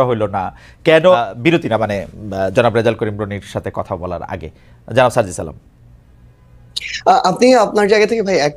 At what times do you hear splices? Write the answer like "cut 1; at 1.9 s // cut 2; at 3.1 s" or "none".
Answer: cut 1; at 1.0 s